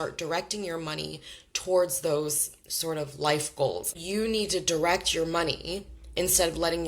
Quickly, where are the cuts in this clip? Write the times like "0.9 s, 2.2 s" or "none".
3.9 s